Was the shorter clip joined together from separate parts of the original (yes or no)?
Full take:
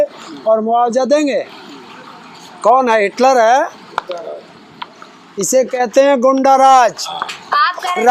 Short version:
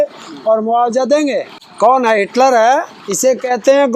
yes